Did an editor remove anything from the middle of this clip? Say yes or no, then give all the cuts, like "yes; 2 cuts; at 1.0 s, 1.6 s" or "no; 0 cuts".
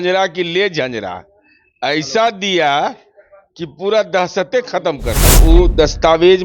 yes; 1 cut; at 5.4 s